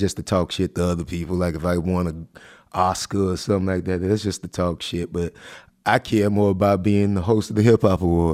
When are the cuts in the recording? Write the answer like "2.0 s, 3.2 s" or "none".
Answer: none